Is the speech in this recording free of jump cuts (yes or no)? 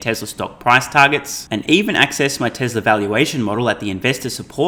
yes